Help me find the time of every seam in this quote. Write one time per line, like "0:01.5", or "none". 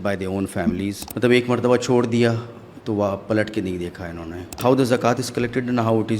0:01.0
0:04.6